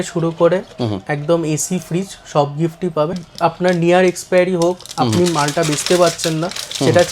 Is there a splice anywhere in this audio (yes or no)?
yes